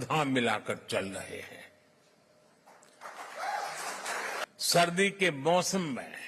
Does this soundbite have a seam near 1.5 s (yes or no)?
no